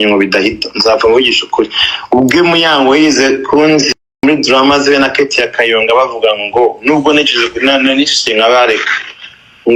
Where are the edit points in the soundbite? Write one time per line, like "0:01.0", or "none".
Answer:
0:04.2